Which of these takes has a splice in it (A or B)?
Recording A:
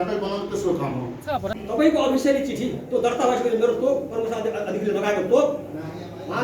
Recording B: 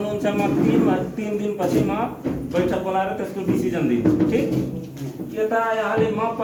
A